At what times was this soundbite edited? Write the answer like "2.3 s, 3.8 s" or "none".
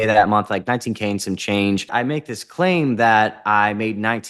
1.9 s